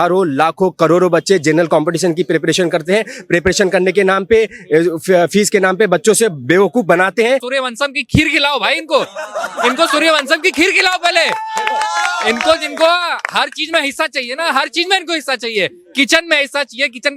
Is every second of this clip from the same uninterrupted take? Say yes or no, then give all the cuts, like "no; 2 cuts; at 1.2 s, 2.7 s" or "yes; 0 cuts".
no; 1 cut; at 7.5 s